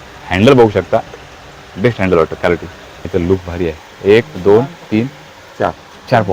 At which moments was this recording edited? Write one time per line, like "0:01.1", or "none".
0:03.1